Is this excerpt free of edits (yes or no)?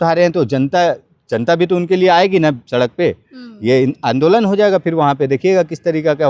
yes